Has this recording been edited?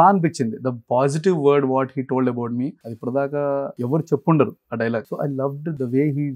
yes; 3 cuts; at 2.9 s, 3.8 s, 5.1 s

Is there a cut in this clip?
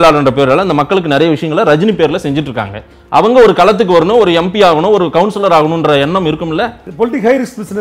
yes; 1 cut; at 6.8 s

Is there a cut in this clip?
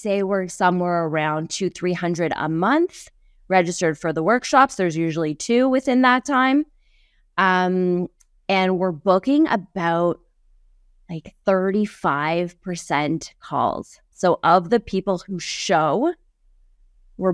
no; 0 cuts

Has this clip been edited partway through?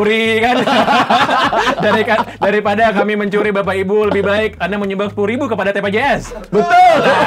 no; 0 cuts

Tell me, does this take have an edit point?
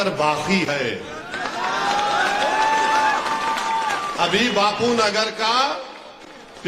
no; 0 cuts

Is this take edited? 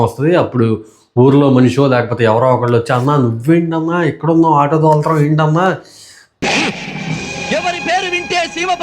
yes; 1 cut; at 6.2 s

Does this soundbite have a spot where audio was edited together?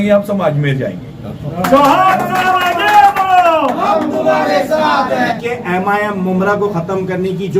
yes; 1 cut; at 5.3 s

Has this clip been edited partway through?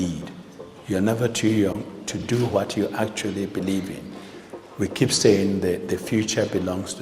yes; 1 cut; at 2.2 s

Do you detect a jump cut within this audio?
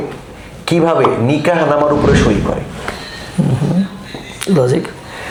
no; 0 cuts

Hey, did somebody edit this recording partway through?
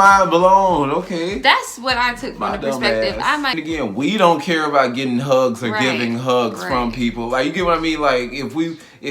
yes; 1 cut; at 3.6 s

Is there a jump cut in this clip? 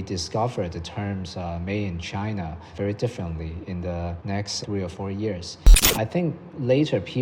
yes; 1 cut; at 5.9 s

